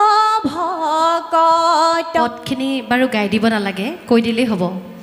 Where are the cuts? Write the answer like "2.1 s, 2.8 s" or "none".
2.2 s